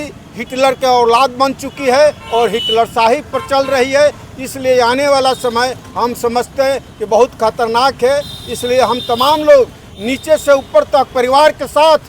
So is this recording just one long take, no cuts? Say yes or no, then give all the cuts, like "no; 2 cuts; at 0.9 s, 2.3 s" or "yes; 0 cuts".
yes; 0 cuts